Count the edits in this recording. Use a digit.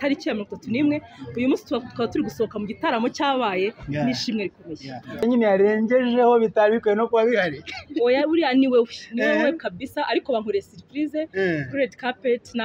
1